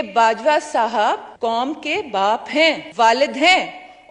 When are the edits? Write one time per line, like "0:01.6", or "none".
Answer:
0:01.3
0:02.9